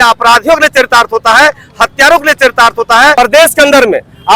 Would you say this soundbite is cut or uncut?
cut